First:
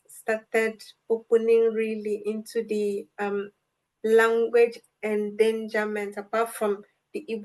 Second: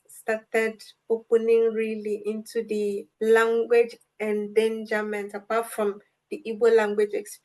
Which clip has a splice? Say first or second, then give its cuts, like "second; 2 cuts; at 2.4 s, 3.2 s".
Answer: second; 1 cut; at 3.1 s